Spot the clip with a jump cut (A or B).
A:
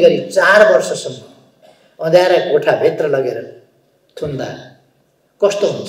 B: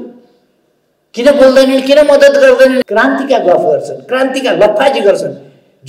B